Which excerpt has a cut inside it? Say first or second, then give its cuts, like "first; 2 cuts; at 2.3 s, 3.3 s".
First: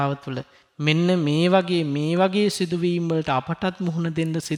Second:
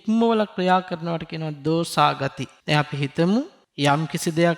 second; 2 cuts; at 2.5 s, 3.6 s